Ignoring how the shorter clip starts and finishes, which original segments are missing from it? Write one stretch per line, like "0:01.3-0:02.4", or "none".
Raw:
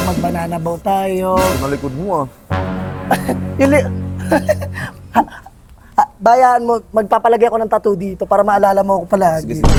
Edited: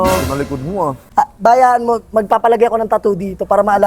0:02.3-0:05.8

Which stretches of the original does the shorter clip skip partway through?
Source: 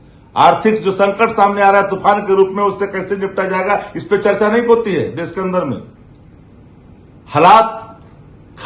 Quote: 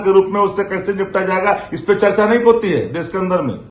none

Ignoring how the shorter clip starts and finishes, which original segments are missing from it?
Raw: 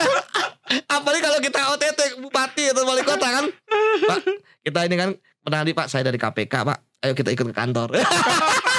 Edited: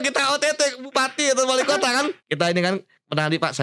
0:03.6-0:04.5

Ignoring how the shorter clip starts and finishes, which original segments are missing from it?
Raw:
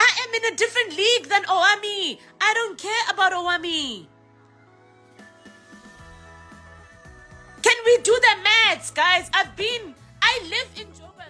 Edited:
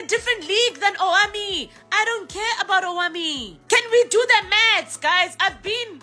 0:04.0-0:07.4

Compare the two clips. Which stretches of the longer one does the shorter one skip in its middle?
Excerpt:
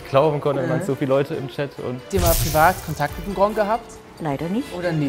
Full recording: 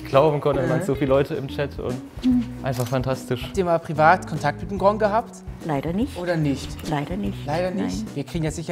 0:02.0-0:03.5

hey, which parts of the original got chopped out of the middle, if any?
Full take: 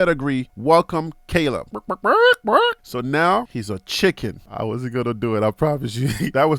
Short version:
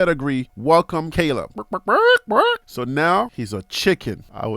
0:01.0-0:01.2

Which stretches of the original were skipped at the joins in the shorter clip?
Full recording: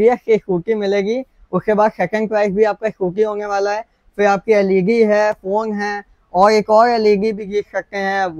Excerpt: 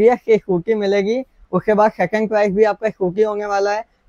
none

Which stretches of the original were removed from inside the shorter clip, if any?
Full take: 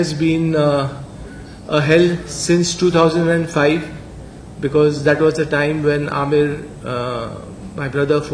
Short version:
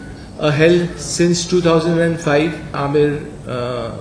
0:04.1-0:06.1

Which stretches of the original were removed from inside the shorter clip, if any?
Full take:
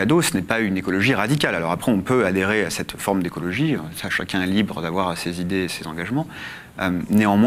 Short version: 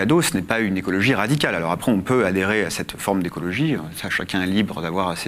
none

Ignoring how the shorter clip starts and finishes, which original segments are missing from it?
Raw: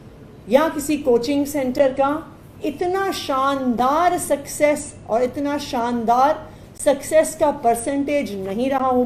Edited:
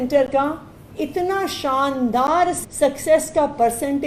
0:04.2-0:06.6

